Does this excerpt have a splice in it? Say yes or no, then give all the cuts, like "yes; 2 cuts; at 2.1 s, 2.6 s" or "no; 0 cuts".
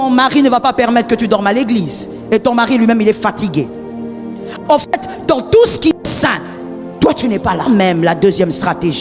yes; 1 cut; at 7.7 s